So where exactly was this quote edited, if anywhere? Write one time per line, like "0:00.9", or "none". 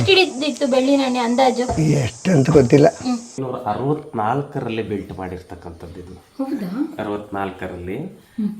0:03.3